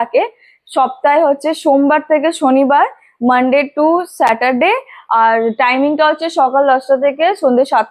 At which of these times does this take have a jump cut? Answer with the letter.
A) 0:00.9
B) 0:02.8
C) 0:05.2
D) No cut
D